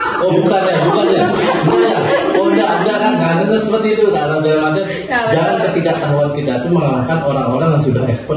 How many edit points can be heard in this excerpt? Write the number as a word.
zero